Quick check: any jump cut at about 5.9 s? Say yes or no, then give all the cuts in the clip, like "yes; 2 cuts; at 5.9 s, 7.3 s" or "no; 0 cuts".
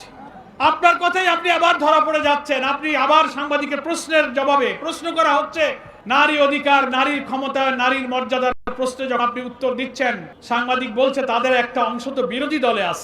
yes; 2 cuts; at 5.9 s, 10.3 s